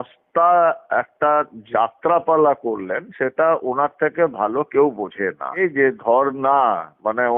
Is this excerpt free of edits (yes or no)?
no